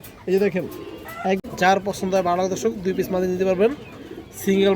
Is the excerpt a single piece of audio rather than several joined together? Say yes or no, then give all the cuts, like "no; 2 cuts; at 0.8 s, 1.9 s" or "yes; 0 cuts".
no; 1 cut; at 1.4 s